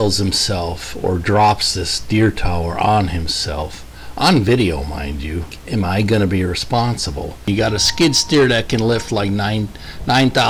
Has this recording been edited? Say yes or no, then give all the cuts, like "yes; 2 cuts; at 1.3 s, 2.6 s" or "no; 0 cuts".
yes; 2 cuts; at 5.6 s, 7.5 s